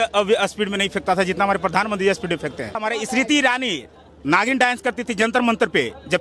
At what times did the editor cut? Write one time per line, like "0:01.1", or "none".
0:02.8